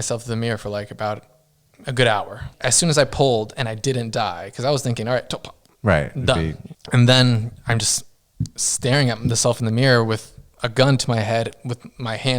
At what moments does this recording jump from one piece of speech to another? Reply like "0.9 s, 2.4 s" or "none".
2.5 s, 6.7 s